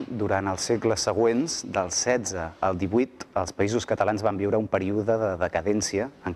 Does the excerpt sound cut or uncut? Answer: uncut